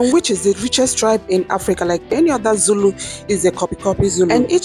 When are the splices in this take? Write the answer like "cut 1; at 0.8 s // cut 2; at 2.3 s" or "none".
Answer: cut 1; at 2.1 s